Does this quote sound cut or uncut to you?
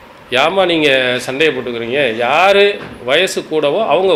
uncut